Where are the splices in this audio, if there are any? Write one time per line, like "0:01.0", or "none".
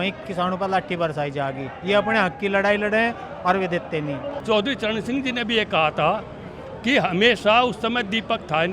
0:04.3